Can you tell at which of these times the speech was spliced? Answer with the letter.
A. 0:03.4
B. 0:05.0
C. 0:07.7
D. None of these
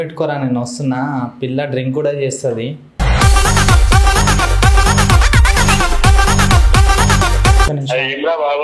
C